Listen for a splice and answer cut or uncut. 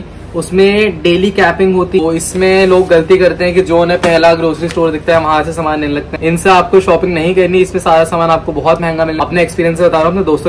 cut